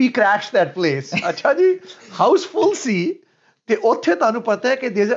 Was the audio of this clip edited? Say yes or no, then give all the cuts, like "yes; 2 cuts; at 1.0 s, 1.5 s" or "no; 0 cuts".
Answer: no; 0 cuts